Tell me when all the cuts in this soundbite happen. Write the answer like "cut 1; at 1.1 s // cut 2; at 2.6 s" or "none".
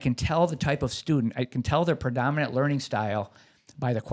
none